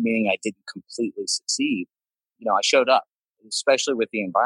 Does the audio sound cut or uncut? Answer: cut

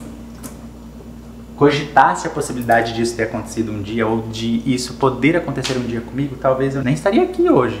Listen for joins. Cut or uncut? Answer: cut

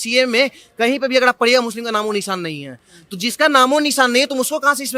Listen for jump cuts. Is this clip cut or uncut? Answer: uncut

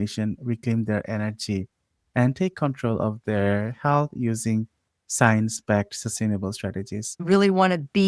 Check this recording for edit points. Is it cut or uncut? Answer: cut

